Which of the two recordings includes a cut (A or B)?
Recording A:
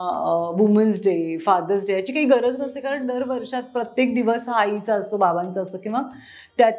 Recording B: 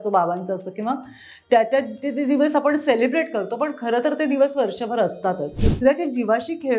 B